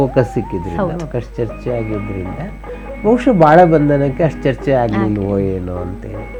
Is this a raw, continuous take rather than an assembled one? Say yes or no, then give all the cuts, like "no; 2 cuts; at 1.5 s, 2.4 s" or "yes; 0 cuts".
yes; 0 cuts